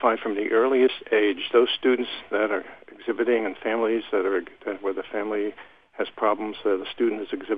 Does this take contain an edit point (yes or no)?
no